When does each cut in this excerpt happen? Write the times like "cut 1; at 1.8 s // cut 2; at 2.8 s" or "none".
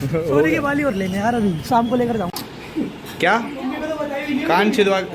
cut 1; at 2.3 s